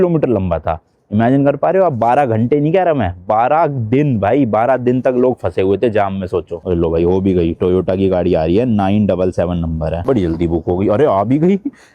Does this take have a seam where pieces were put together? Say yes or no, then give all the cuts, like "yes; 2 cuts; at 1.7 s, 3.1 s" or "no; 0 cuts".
yes; 1 cut; at 6.6 s